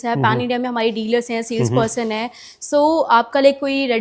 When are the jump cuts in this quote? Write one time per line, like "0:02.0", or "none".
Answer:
none